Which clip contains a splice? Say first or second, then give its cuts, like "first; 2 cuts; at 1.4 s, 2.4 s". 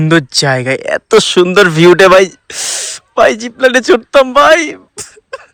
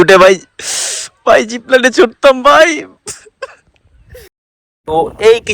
second; 1 cut; at 4.6 s